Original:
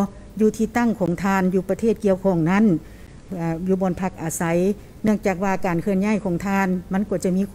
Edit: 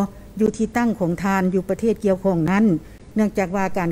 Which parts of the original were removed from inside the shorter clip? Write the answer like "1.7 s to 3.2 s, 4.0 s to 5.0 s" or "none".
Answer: 3.0 s to 4.9 s

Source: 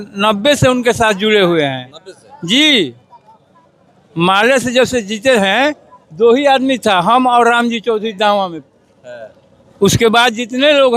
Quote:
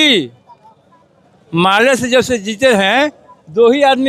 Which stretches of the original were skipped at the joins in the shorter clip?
none

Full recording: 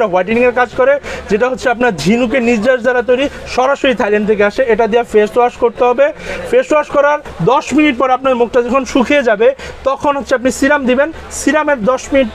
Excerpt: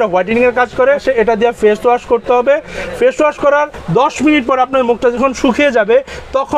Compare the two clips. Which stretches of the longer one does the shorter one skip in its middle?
1.0 s to 4.5 s

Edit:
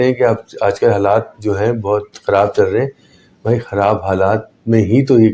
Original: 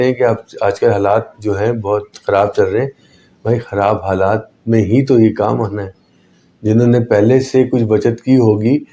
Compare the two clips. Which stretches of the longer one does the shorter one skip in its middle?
none

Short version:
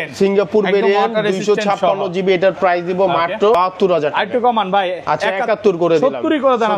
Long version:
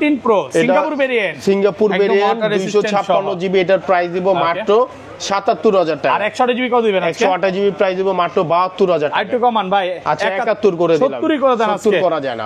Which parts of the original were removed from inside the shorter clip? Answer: 4.8 s to 8.5 s

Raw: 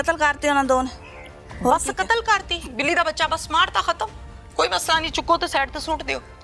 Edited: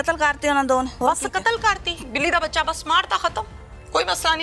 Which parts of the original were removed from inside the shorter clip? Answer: 0.9 s to 1.6 s

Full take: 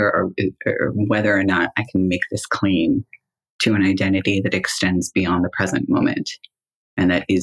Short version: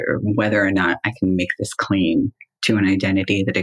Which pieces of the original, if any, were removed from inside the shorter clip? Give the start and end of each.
3.2 s to 3.4 s

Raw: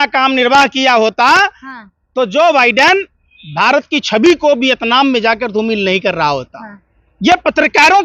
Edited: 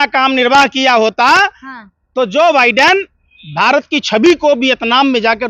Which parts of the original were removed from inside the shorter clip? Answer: none

